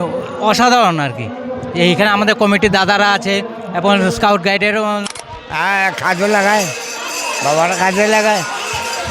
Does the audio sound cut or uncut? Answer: cut